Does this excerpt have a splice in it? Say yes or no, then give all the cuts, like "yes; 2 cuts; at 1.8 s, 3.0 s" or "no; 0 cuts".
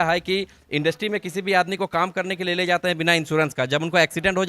no; 0 cuts